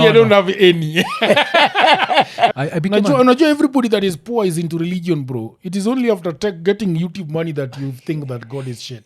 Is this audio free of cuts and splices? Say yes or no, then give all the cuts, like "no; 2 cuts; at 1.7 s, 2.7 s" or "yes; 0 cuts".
no; 1 cut; at 2.5 s